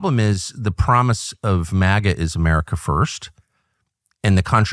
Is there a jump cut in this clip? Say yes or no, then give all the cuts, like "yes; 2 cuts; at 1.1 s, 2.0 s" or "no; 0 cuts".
no; 0 cuts